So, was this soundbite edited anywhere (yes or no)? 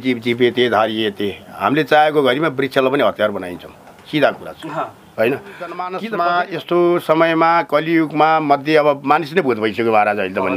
yes